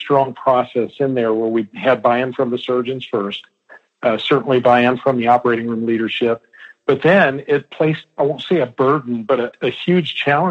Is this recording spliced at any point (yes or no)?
yes